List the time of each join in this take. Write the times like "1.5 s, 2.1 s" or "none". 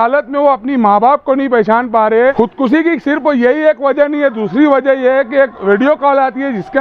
2.3 s